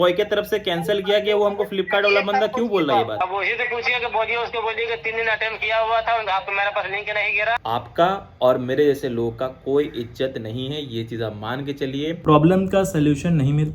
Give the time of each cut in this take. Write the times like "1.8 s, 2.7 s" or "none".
7.6 s, 12.2 s